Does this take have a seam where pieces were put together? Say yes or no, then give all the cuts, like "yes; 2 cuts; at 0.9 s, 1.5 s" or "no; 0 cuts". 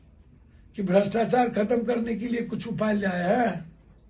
no; 0 cuts